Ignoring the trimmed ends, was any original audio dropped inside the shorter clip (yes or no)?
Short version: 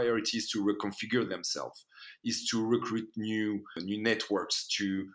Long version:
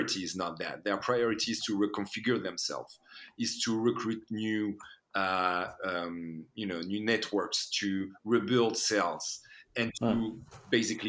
yes